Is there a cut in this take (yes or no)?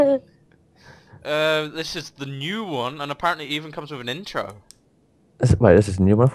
yes